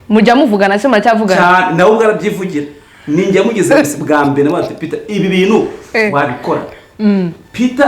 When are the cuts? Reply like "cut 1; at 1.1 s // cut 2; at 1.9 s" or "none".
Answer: none